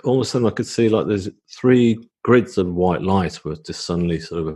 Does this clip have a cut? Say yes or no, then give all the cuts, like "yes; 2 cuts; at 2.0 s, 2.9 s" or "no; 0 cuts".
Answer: no; 0 cuts